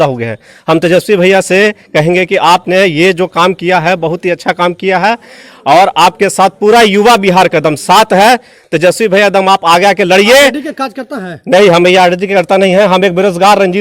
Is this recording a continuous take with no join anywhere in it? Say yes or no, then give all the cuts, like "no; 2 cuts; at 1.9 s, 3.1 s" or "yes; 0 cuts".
yes; 0 cuts